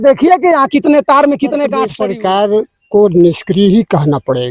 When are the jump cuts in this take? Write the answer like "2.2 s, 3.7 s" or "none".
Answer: 1.9 s